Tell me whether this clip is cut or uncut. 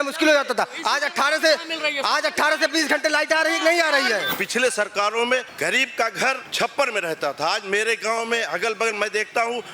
cut